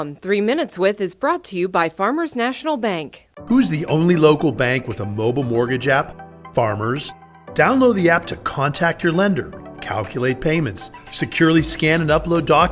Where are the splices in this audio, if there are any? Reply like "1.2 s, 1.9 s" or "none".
none